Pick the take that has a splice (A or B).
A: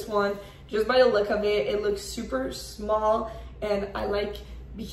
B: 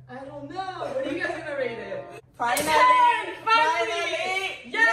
B